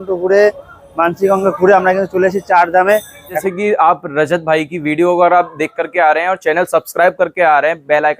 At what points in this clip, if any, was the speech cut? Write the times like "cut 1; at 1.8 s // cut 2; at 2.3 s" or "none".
cut 1; at 3.4 s